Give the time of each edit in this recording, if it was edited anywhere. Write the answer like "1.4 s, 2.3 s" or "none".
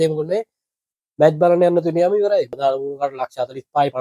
2.5 s